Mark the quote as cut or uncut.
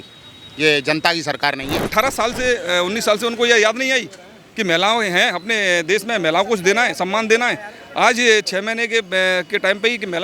cut